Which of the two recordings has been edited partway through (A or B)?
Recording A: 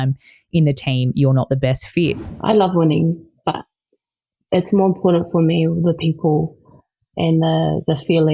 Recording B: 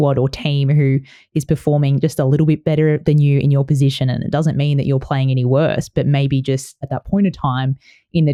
A